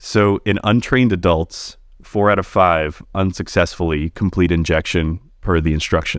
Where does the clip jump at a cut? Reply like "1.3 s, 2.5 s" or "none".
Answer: none